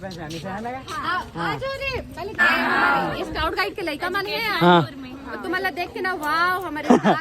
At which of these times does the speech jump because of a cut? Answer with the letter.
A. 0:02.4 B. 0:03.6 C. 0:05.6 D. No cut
A